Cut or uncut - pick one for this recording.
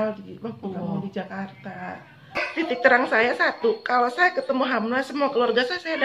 cut